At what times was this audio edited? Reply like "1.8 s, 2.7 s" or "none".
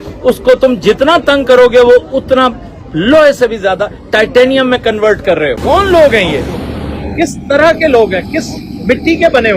5.6 s